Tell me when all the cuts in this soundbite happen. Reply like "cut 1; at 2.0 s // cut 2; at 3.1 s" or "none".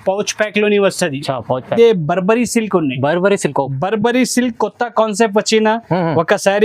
cut 1; at 1.7 s